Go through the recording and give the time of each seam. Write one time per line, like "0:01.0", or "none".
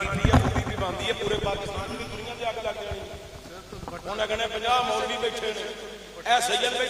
none